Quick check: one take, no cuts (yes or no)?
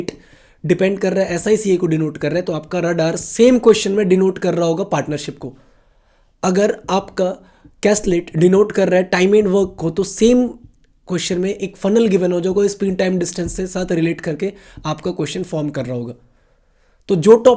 yes